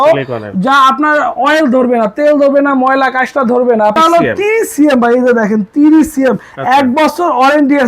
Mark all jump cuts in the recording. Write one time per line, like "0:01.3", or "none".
0:04.0